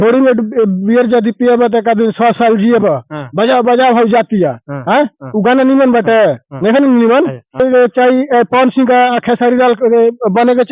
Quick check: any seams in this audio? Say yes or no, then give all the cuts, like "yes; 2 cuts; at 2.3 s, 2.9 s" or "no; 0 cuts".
yes; 1 cut; at 7.6 s